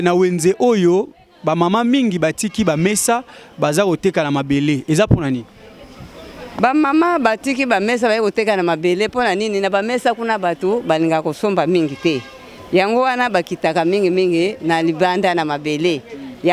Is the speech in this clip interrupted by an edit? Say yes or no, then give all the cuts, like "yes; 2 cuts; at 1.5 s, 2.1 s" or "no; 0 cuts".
no; 0 cuts